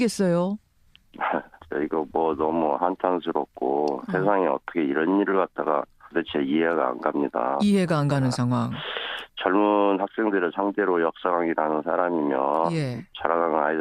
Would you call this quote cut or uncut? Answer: cut